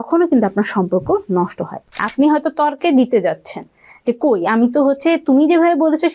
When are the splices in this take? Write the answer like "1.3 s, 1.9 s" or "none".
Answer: 2.0 s